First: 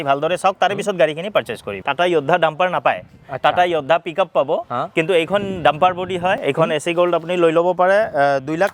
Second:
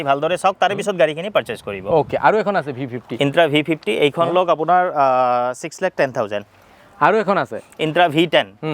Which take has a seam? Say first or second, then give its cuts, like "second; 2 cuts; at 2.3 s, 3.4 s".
first; 2 cuts; at 1.7 s, 6.4 s